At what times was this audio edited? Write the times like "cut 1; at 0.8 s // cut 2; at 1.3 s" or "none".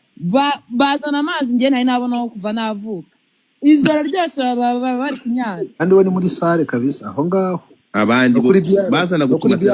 cut 1; at 5.8 s